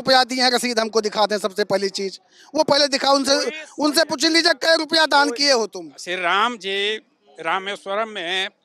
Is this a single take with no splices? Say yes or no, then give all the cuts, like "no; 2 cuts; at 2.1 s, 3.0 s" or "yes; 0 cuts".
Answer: no; 1 cut; at 5.9 s